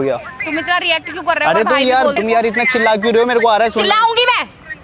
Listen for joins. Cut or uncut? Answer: cut